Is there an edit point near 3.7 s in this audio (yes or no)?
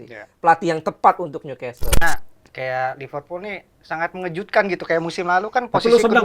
no